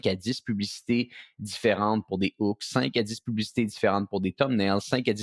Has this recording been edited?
no; 0 cuts

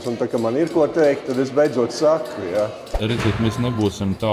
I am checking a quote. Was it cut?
yes; 1 cut; at 2.9 s

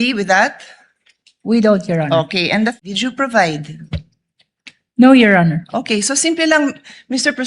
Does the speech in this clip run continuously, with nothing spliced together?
no; 1 cut; at 2.8 s

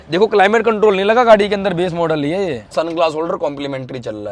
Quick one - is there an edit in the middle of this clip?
yes; 1 cut; at 2.7 s

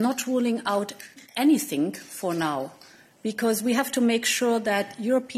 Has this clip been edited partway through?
yes; 1 cut; at 1.1 s

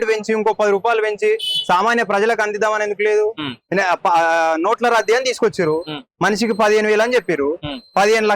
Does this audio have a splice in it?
no; 0 cuts

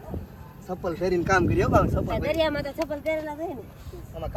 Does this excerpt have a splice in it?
no; 0 cuts

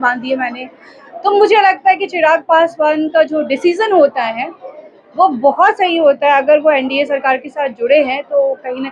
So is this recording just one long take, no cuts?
yes; 0 cuts

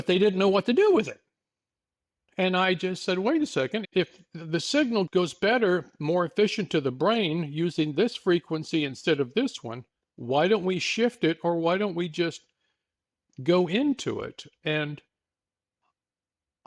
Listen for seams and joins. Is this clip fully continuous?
no; 2 cuts; at 3.9 s, 5.1 s

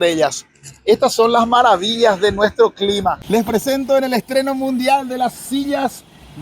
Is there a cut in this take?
yes; 1 cut; at 3.2 s

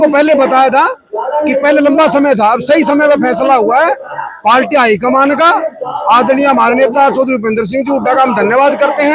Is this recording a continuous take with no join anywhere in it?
yes; 0 cuts

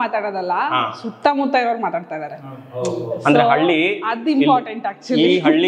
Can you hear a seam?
no; 0 cuts

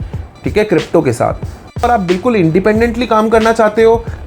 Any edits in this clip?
yes; 1 cut; at 1.8 s

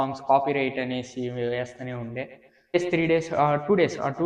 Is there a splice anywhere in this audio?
yes; 1 cut; at 2.8 s

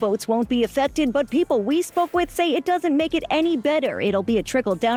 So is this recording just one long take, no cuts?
yes; 0 cuts

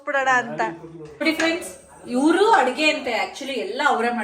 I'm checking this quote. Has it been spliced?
yes; 1 cut; at 1.2 s

